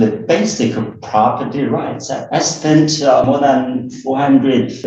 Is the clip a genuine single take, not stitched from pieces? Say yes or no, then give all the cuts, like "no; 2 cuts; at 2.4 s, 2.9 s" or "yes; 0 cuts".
no; 1 cut; at 3.3 s